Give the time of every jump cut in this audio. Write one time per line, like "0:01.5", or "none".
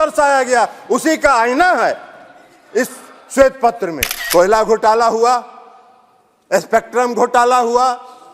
0:04.1